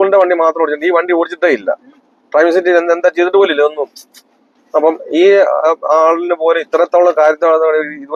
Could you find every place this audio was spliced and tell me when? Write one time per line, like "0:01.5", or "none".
none